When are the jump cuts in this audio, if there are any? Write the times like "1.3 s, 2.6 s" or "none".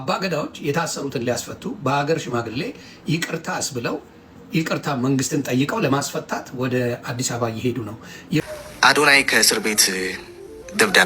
8.4 s